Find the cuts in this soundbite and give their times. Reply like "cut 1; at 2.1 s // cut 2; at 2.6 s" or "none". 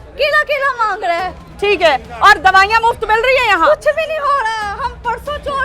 none